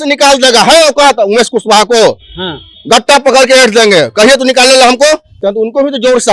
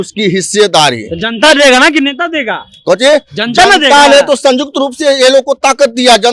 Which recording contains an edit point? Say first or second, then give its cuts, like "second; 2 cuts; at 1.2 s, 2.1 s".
first; 1 cut; at 5.4 s